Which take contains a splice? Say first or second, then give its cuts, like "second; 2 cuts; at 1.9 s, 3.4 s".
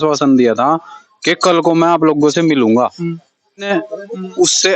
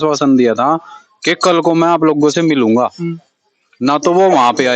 first; 1 cut; at 3.7 s